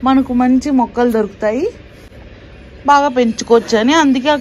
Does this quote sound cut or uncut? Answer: uncut